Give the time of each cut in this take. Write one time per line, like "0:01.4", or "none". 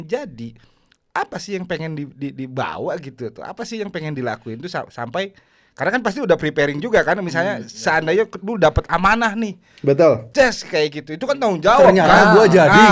none

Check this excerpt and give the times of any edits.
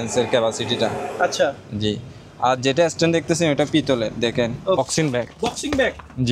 0:04.8

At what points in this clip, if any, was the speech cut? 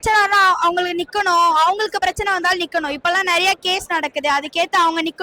none

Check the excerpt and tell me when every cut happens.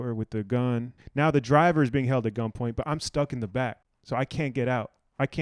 0:01.0
0:03.9

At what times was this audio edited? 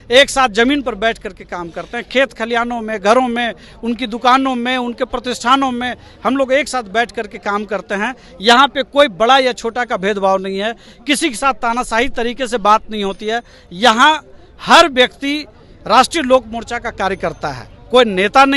none

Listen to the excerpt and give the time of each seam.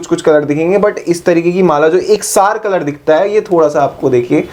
none

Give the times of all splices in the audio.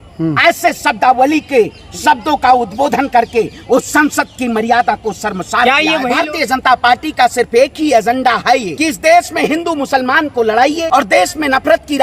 0:06.1
0:08.7
0:10.8

